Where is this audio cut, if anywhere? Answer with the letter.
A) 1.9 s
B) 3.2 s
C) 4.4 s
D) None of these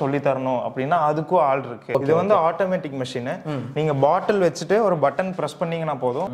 A